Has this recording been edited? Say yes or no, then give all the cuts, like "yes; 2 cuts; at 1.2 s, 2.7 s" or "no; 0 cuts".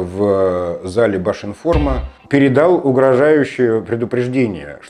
yes; 1 cut; at 2.1 s